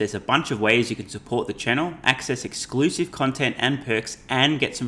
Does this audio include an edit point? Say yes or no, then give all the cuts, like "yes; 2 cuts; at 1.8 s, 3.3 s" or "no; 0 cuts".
no; 0 cuts